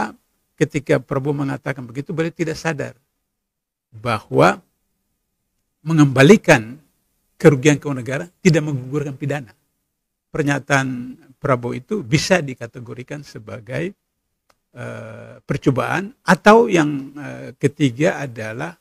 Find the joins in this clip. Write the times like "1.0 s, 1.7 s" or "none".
10.4 s